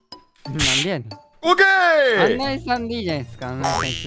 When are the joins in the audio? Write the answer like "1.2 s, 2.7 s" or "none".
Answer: none